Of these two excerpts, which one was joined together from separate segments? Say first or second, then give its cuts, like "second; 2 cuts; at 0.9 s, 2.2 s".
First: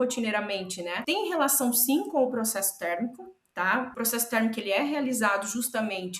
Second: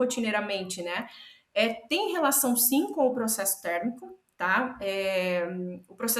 first; 2 cuts; at 1.0 s, 3.9 s